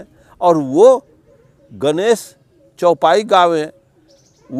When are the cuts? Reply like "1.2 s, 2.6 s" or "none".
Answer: none